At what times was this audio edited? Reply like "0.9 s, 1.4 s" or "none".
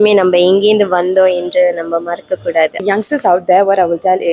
2.8 s